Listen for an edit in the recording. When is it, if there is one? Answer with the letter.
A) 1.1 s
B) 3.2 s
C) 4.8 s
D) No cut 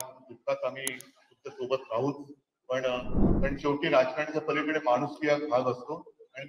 B